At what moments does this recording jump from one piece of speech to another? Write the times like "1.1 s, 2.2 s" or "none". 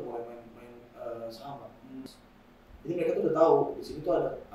2.0 s